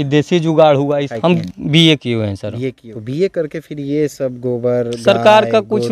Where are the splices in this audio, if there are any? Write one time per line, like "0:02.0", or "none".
0:01.1
0:02.8